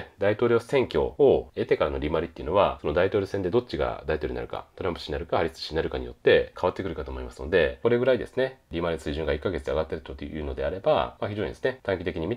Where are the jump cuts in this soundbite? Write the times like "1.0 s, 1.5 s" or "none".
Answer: 1.2 s, 2.8 s, 6.5 s, 7.8 s, 11.4 s